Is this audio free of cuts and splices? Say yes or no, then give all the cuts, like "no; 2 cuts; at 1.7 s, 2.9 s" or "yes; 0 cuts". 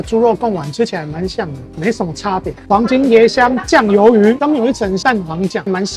no; 2 cuts; at 2.7 s, 4.4 s